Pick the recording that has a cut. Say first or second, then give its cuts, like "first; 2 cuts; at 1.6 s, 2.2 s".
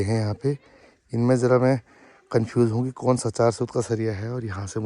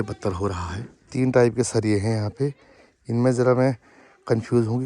second; 1 cut; at 0.9 s